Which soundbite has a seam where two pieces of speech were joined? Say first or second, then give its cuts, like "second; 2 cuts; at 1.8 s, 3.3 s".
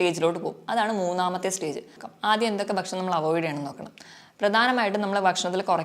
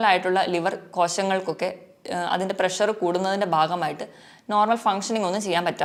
first; 1 cut; at 2.0 s